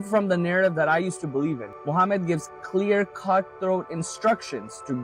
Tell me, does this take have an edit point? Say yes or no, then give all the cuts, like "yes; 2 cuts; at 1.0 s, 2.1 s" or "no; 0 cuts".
yes; 1 cut; at 1.7 s